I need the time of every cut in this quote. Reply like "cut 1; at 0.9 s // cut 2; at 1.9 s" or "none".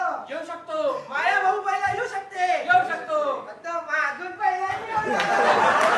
none